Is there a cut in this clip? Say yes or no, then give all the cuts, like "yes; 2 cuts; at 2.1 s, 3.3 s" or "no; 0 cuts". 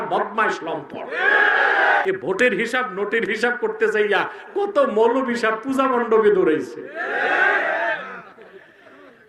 yes; 1 cut; at 2.0 s